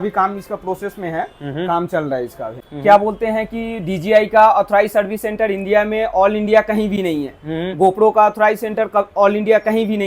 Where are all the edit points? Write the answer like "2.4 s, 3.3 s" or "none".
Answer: 2.7 s